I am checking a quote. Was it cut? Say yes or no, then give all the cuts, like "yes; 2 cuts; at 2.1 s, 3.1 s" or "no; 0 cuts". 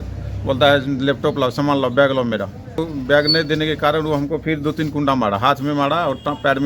yes; 1 cut; at 2.8 s